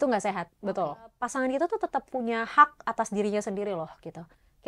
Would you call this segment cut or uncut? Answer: cut